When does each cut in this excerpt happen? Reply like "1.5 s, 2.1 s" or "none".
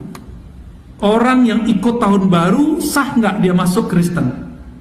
none